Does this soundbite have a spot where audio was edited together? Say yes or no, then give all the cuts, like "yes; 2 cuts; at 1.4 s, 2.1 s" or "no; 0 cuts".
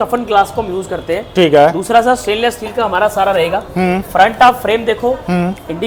no; 0 cuts